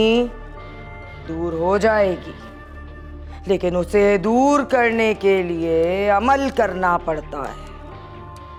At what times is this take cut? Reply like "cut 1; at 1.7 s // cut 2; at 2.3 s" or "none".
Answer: none